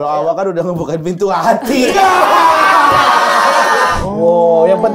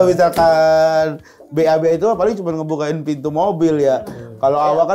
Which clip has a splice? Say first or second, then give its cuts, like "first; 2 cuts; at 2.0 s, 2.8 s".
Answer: first; 1 cut; at 4.0 s